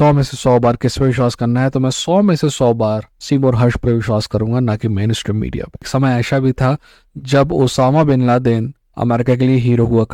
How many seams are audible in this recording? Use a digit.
1